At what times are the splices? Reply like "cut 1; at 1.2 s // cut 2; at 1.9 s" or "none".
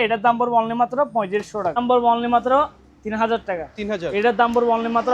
cut 1; at 1.8 s